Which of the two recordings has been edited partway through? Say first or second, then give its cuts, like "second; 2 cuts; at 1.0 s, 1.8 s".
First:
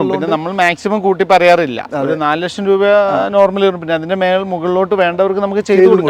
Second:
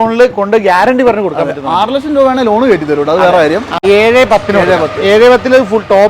second; 1 cut; at 3.8 s